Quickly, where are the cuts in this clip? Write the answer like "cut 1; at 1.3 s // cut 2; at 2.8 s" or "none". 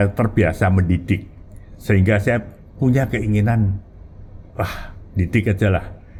none

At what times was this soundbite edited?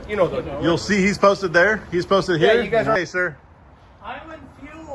cut 1; at 3.0 s

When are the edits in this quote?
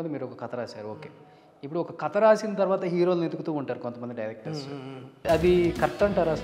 cut 1; at 5.2 s

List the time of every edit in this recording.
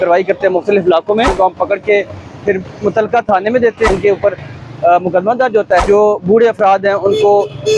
cut 1; at 1.3 s // cut 2; at 3.9 s // cut 3; at 5.8 s

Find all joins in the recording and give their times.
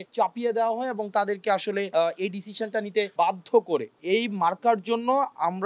cut 1; at 4.0 s

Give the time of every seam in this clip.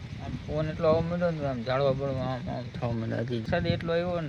cut 1; at 3.3 s

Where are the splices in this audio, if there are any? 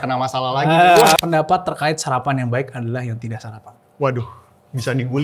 cut 1; at 1.2 s

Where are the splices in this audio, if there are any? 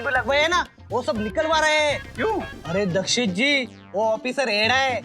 cut 1; at 2.6 s

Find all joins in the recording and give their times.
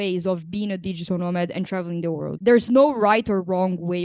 cut 1; at 2.3 s

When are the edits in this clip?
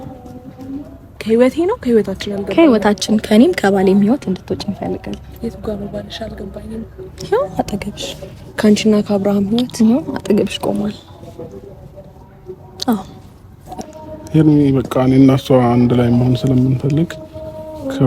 cut 1; at 1.2 s // cut 2; at 13.8 s

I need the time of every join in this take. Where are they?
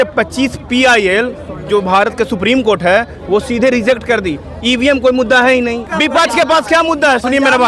cut 1; at 5.9 s

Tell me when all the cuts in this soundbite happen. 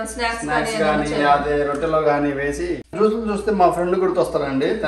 cut 1; at 2.8 s

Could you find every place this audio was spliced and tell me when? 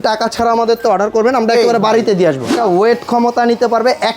cut 1; at 2.5 s

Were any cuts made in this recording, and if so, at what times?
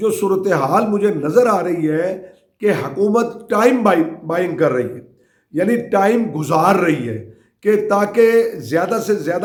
none

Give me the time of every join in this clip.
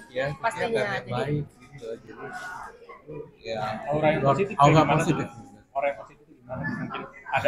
none

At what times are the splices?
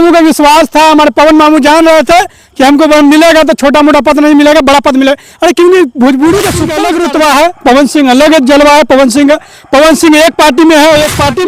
cut 1; at 6.7 s

